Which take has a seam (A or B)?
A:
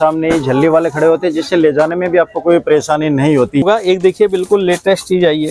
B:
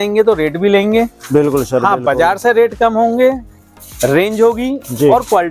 A